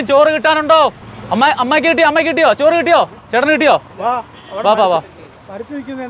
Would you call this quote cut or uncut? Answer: uncut